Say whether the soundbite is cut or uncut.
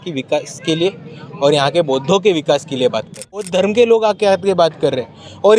cut